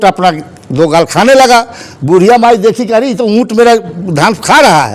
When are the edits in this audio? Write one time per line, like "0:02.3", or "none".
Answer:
none